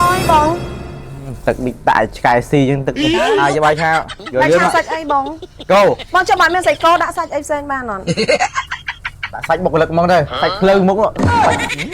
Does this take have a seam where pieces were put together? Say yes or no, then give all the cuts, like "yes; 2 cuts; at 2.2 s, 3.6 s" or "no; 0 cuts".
yes; 3 cuts; at 3.3 s, 6.0 s, 10.3 s